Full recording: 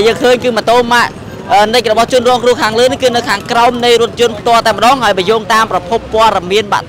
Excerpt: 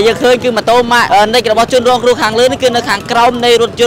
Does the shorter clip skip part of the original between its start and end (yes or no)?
yes